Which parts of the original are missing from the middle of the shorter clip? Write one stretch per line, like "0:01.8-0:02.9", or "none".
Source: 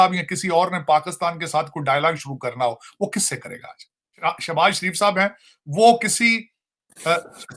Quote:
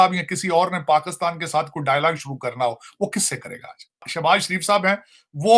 0:04.1-0:04.4